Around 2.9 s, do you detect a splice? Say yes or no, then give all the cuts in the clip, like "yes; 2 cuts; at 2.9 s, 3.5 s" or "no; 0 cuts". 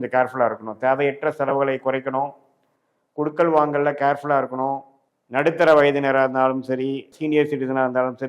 no; 2 cuts; at 4.9 s, 7.1 s